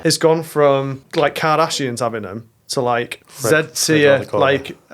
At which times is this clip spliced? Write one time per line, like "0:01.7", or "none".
0:01.0
0:03.2